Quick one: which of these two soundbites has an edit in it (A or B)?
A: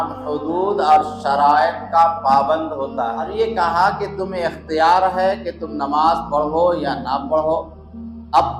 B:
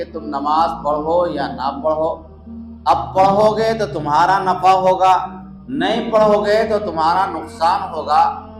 A